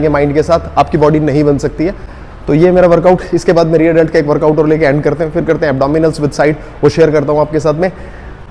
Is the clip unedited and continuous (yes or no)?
yes